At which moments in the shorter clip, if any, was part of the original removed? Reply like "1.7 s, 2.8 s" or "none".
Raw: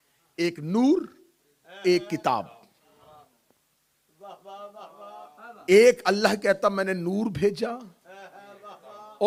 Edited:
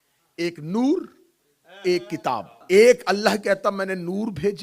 2.5 s